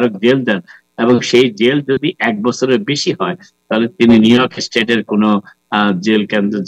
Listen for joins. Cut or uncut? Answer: uncut